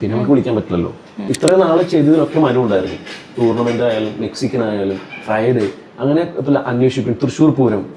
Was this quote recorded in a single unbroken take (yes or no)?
no